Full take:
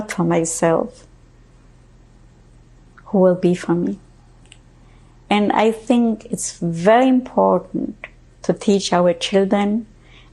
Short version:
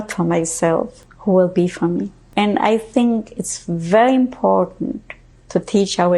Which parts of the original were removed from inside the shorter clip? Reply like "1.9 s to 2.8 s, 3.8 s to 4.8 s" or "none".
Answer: 1.0 s to 2.9 s, 4.0 s to 5.1 s

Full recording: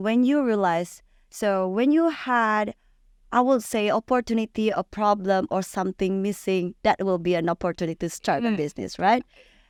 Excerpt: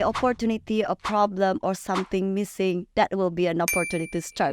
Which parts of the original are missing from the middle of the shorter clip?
none

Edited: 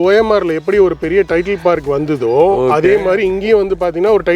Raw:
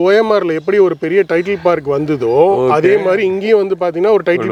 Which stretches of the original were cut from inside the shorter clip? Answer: none

